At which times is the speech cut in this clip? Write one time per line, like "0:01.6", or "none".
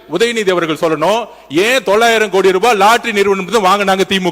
none